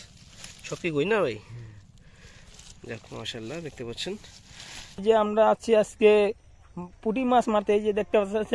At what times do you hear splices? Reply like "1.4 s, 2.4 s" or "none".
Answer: 5.0 s